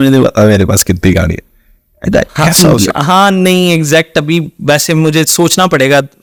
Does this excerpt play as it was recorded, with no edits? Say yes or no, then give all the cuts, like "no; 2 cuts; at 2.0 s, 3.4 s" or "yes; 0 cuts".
yes; 0 cuts